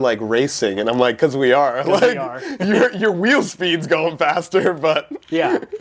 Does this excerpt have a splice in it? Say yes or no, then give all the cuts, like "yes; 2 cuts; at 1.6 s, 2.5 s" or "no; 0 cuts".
no; 0 cuts